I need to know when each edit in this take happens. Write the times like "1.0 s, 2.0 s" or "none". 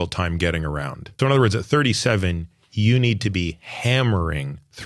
1.1 s